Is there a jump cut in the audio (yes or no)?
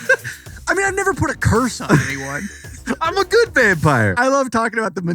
yes